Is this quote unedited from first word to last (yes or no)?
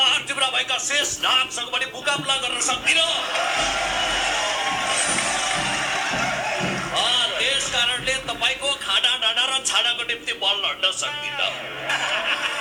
yes